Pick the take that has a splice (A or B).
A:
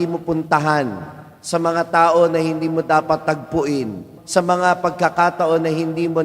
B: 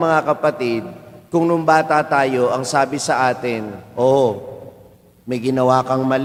A